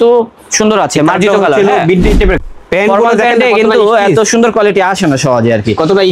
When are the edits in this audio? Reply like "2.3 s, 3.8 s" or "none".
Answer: 2.4 s